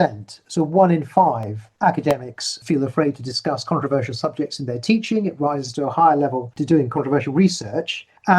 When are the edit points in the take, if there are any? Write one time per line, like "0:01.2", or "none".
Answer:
0:06.5